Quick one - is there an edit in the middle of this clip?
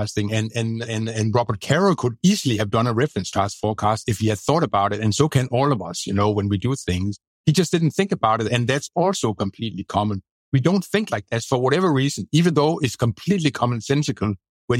no; 0 cuts

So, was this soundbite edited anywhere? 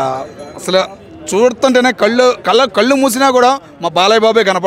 no; 0 cuts

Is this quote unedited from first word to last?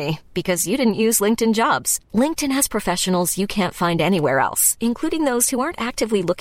yes; 0 cuts

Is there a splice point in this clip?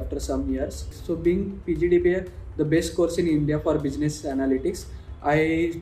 yes; 1 cut; at 0.9 s

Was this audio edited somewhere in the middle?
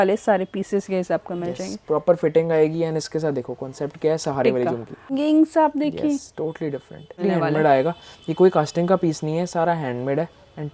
yes; 2 cuts; at 5.1 s, 7.2 s

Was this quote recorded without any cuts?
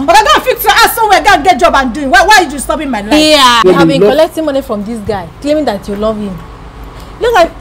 no; 1 cut; at 3.6 s

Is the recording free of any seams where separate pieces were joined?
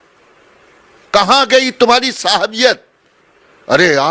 yes; 0 cuts

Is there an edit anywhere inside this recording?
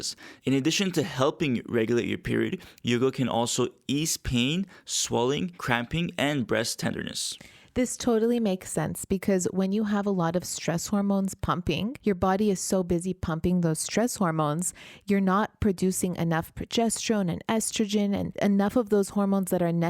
yes; 3 cuts; at 5.6 s, 11.9 s, 18.3 s

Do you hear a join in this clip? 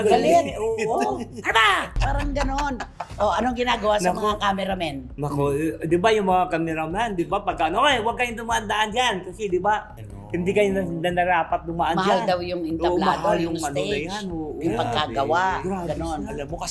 no; 0 cuts

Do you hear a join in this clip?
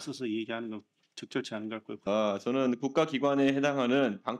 yes; 1 cut; at 2.0 s

